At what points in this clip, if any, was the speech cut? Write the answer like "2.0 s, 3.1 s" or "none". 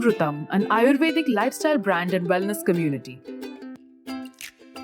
3.0 s